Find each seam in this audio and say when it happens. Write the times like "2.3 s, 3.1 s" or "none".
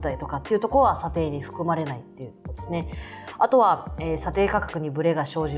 none